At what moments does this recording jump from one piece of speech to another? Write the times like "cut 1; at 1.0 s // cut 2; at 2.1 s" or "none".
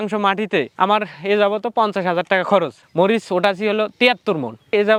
none